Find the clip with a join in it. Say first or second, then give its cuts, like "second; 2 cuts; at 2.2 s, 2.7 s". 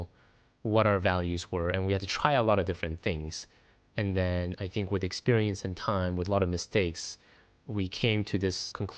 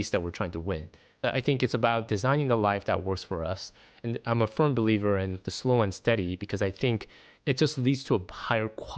second; 1 cut; at 1.2 s